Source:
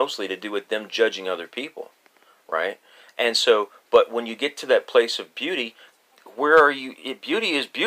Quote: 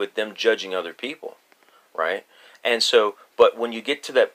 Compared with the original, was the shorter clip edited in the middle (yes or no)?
no